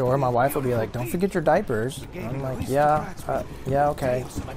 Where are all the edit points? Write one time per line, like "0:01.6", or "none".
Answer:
none